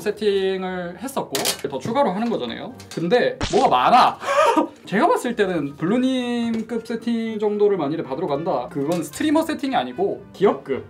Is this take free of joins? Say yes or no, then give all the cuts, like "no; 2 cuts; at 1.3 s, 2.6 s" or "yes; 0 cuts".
no; 4 cuts; at 1.7 s, 3.4 s, 4.8 s, 8.7 s